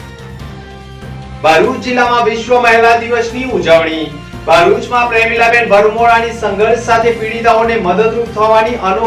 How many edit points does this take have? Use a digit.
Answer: 1